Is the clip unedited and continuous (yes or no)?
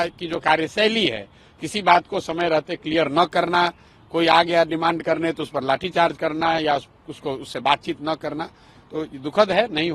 yes